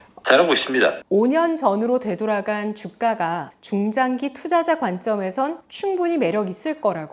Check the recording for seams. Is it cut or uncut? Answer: cut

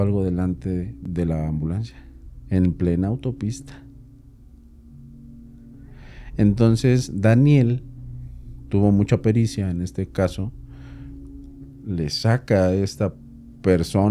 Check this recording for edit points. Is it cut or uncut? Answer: cut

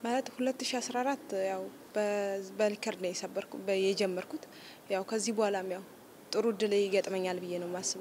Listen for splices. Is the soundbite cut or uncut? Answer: uncut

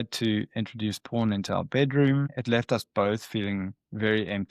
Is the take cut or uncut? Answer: cut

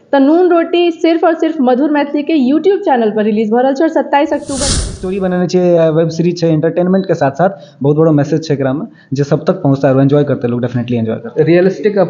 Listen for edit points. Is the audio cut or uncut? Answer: cut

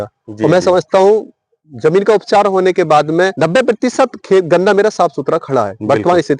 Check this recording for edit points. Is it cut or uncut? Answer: cut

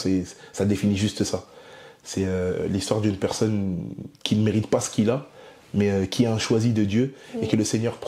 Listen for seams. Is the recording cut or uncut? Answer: uncut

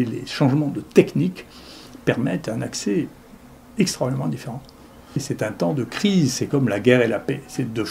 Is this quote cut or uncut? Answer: cut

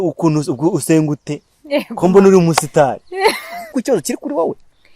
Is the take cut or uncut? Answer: cut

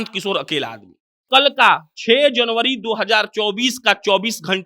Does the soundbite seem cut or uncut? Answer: cut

